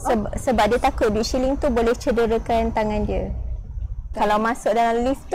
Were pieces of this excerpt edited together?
yes; 1 cut; at 4.1 s

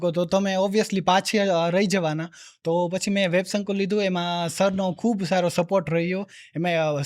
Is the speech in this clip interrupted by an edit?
no; 0 cuts

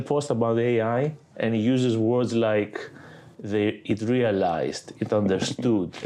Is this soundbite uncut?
yes; 0 cuts

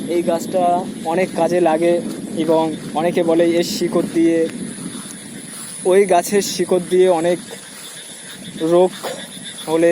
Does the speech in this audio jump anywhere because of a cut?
no; 0 cuts

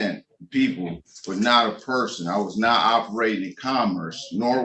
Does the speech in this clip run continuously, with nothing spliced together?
yes; 0 cuts

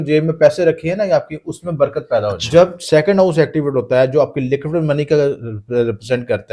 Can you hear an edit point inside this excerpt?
yes; 1 cut; at 2.4 s

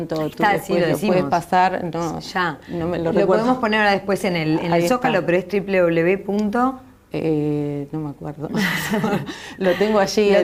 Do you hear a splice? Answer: no; 0 cuts

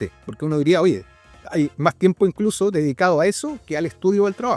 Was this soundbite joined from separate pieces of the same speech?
no; 0 cuts

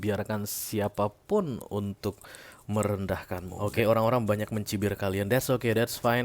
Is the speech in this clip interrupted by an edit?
yes; 1 cut; at 3.5 s

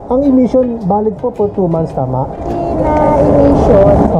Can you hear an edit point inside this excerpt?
no; 0 cuts

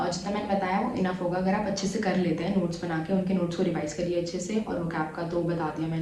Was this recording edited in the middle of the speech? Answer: no; 0 cuts

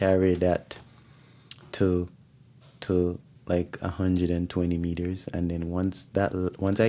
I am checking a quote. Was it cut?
no; 0 cuts

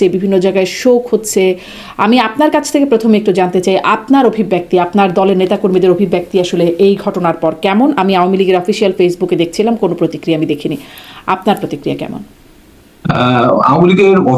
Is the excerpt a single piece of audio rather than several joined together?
yes; 0 cuts

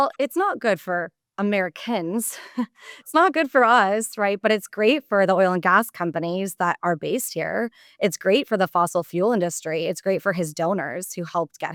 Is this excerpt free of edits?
yes; 0 cuts

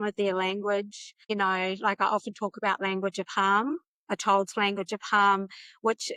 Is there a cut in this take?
no; 0 cuts

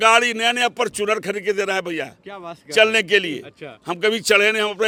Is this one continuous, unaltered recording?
yes; 0 cuts

